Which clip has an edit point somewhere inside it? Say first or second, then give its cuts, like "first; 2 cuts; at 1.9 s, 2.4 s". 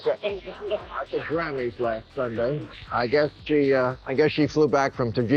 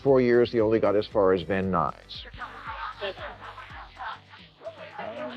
first; 1 cut; at 2.5 s